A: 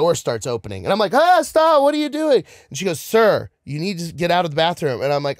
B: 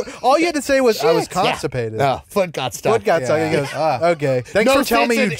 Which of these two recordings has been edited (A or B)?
B